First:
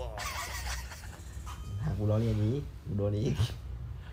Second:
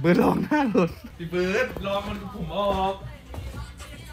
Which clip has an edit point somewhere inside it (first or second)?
second